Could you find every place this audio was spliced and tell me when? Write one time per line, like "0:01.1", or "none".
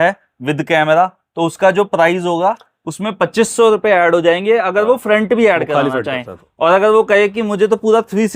none